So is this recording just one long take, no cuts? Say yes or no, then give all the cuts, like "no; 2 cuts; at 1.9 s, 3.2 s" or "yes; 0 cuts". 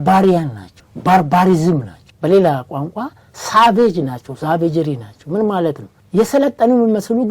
yes; 0 cuts